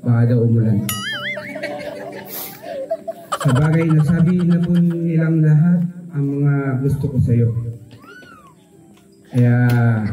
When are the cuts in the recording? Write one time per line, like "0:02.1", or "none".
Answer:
none